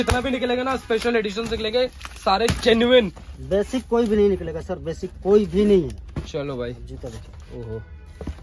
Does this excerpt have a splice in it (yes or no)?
no